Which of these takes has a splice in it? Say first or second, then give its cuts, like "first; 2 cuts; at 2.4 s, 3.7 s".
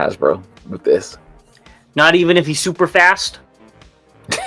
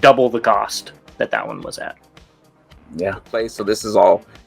second; 1 cut; at 3.5 s